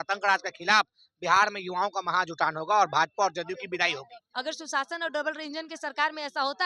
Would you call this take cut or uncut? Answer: cut